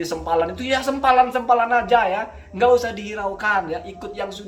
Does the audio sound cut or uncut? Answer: uncut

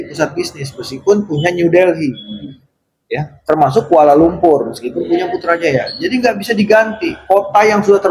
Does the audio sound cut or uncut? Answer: uncut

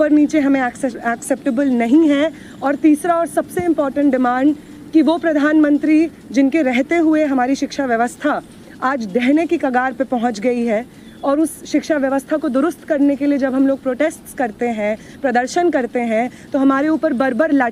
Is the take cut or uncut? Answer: uncut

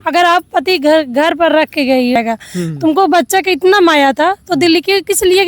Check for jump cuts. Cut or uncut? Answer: cut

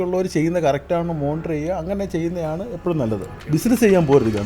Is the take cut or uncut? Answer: cut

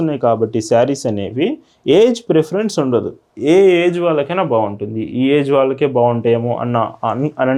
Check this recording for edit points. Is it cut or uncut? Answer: uncut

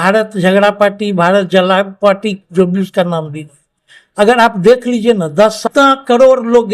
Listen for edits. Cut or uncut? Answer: cut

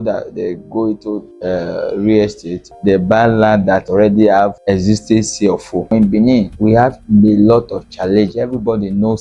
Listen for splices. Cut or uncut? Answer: cut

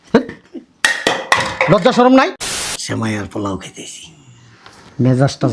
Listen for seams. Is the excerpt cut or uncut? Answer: cut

